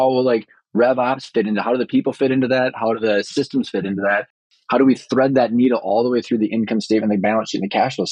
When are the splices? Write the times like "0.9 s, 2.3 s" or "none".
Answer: none